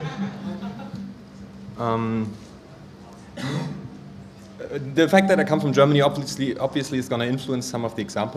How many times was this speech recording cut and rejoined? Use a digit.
1